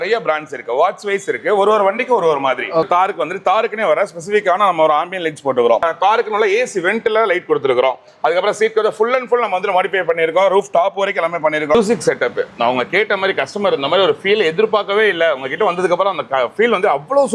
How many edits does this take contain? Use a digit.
3